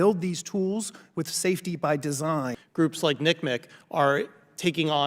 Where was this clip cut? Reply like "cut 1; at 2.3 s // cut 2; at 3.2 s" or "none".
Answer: cut 1; at 2.6 s

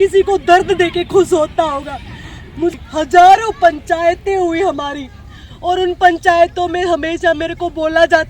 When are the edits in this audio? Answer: cut 1; at 2.7 s

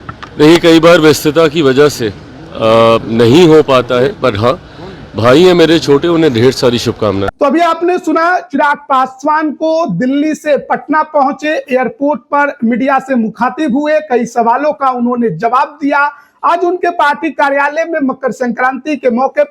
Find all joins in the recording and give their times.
none

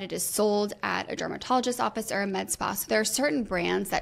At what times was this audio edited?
none

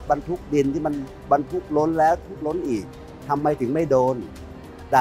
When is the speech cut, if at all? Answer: none

